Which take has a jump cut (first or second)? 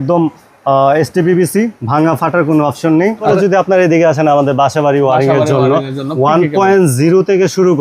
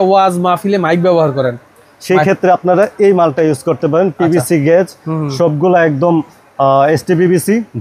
first